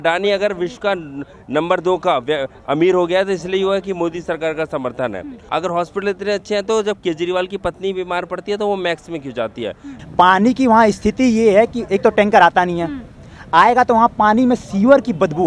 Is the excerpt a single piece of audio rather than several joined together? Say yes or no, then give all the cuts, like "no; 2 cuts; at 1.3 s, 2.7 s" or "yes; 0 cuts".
no; 2 cuts; at 5.4 s, 9.9 s